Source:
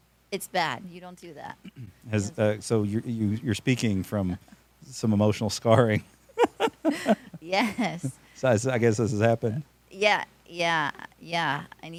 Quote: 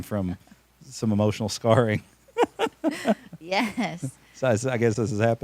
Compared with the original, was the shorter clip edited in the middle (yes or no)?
no